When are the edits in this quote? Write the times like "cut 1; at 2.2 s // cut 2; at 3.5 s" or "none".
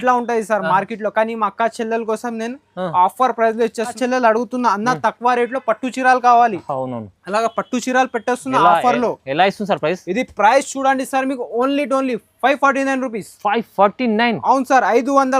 cut 1; at 4.0 s